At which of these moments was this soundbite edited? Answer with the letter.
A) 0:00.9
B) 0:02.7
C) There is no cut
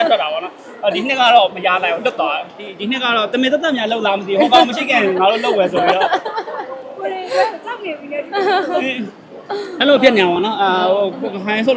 B